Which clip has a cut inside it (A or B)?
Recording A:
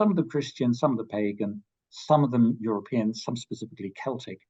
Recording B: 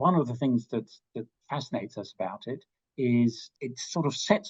B